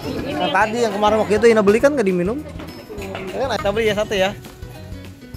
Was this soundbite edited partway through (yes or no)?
yes